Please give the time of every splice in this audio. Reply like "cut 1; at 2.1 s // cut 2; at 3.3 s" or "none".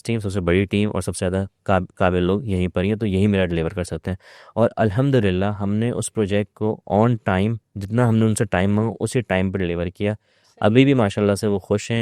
none